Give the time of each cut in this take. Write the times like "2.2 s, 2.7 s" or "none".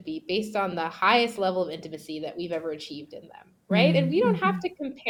none